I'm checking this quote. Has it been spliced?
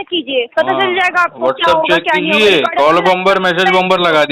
no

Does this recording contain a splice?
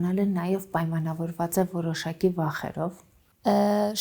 no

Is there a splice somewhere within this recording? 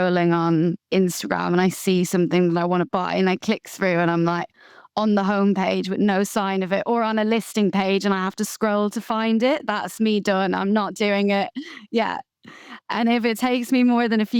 no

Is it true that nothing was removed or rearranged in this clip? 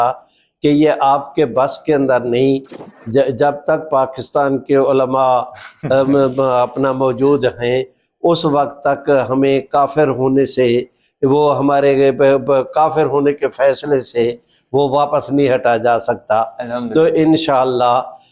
yes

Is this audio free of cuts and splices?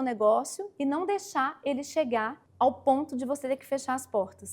no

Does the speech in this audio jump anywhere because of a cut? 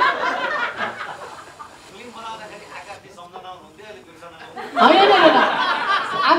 yes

